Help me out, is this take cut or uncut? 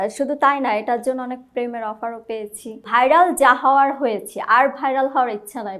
cut